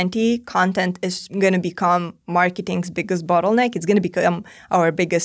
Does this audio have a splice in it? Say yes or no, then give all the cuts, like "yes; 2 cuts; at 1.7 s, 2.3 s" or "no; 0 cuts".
yes; 1 cut; at 1.2 s